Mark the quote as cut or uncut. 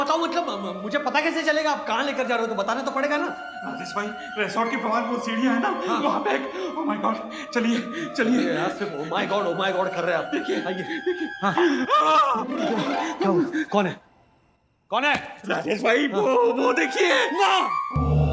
uncut